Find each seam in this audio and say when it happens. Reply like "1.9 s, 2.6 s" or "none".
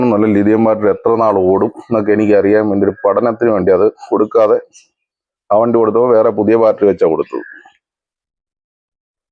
none